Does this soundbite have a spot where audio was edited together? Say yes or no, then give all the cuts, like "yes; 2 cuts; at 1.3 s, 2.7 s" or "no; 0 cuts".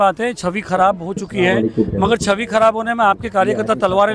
no; 0 cuts